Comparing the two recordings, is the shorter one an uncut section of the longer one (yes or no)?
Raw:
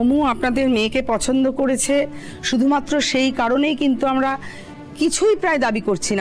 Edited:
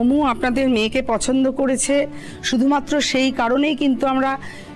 yes